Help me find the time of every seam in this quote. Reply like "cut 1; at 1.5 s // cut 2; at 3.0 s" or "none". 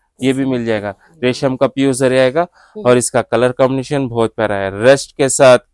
none